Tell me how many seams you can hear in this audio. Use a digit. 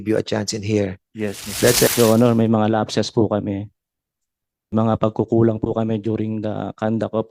2